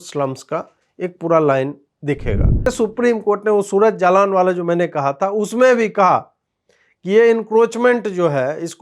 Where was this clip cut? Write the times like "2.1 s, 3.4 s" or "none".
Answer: 2.7 s

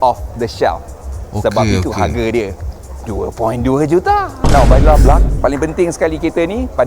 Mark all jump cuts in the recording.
5.3 s

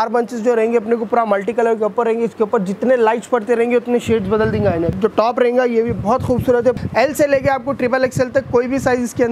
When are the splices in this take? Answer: 4.9 s, 6.8 s

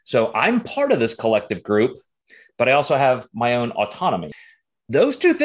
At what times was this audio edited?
4.3 s

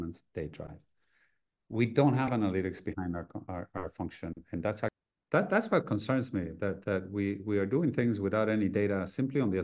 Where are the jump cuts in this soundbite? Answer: 4.9 s

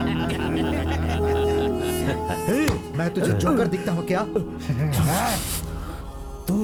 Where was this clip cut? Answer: none

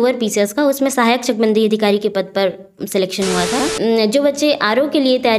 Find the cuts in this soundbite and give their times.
3.7 s

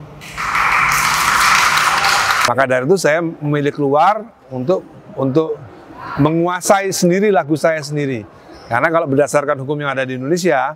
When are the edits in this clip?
2.4 s

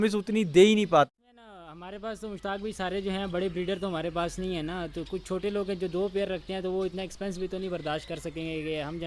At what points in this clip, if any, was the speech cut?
1.1 s

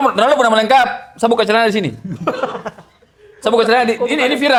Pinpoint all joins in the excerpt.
none

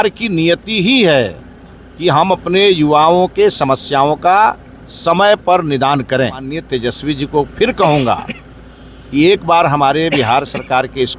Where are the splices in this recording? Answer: 6.6 s

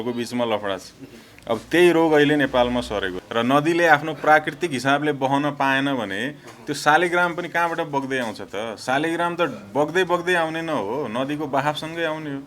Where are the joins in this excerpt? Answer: 3.2 s

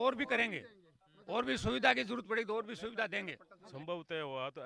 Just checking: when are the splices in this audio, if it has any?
3.7 s

